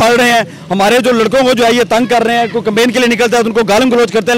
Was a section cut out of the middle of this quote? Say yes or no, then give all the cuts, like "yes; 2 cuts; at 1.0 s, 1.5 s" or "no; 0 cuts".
no; 0 cuts